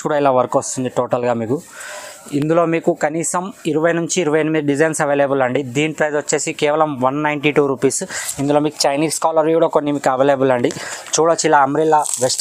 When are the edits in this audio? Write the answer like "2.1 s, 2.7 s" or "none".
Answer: none